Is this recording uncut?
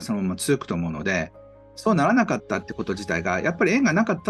yes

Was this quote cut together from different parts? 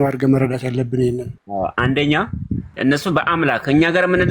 yes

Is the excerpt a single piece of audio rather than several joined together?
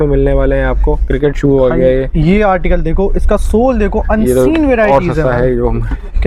yes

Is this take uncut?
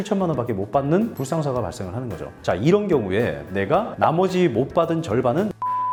yes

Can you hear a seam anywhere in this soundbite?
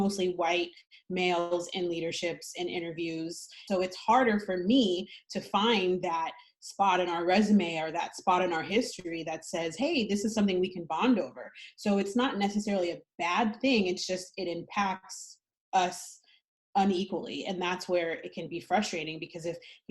yes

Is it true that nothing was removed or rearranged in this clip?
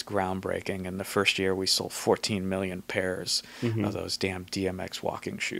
yes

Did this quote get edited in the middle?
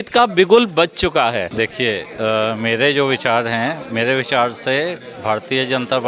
yes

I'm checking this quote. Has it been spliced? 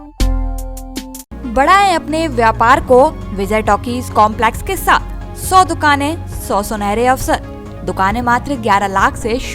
no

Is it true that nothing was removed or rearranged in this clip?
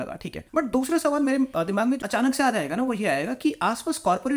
no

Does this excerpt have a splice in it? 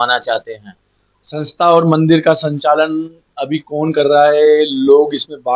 no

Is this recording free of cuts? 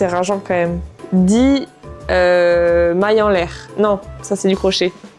no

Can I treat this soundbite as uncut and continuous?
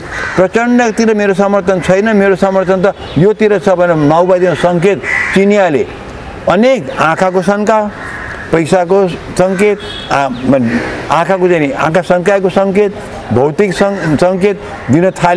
yes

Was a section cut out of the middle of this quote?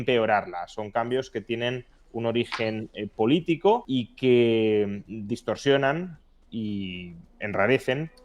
yes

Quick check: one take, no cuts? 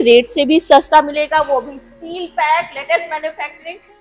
yes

